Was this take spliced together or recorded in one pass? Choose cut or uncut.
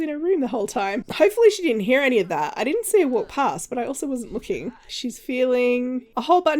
cut